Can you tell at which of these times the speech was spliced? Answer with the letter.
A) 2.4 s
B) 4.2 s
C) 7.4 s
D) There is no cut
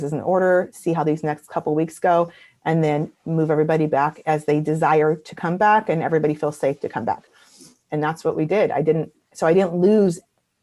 D